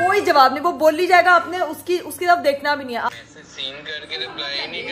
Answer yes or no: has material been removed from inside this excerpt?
yes